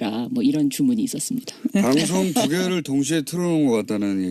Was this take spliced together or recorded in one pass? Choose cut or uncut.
cut